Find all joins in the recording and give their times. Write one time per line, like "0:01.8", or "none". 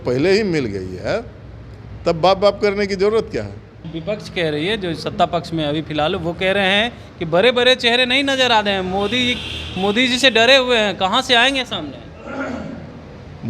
0:03.9